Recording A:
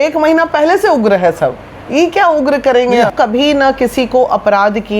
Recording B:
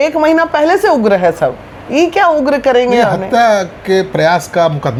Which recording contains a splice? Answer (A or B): A